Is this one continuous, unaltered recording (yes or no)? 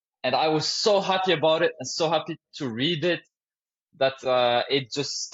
yes